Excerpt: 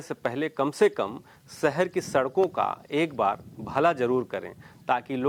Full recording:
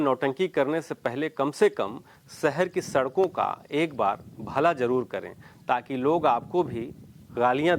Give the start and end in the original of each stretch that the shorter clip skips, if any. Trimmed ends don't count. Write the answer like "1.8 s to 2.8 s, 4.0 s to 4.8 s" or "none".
none